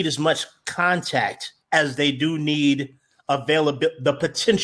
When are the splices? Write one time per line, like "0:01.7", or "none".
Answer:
none